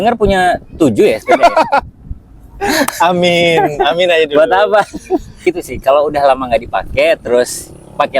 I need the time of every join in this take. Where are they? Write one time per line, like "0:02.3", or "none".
0:05.4